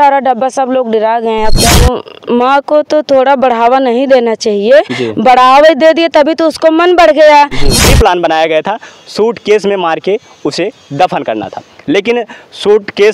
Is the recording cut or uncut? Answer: cut